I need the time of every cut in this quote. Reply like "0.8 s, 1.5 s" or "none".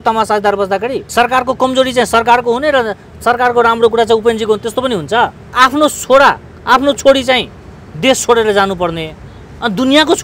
1.0 s, 5.4 s